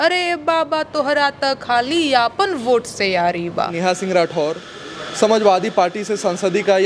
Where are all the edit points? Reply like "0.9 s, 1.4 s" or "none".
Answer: 3.7 s

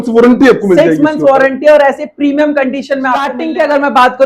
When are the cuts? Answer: 3.4 s

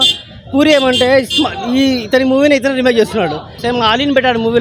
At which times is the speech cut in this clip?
3.5 s

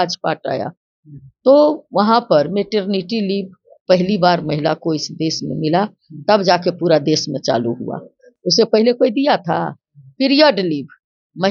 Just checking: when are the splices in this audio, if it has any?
none

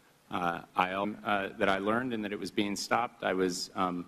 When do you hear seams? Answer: none

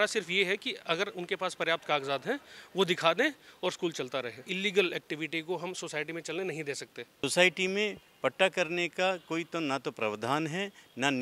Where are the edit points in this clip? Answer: 4.5 s, 7.2 s

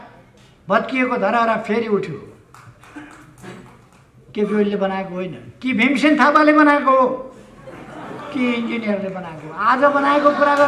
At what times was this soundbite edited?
none

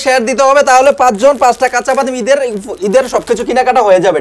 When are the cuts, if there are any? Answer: none

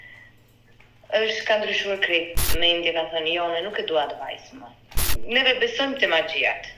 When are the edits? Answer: 2.5 s, 4.9 s

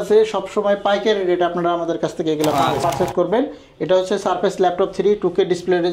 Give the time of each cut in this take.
2.8 s

